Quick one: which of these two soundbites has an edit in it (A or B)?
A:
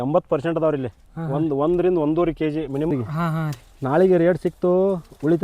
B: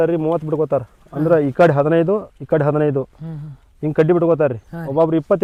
A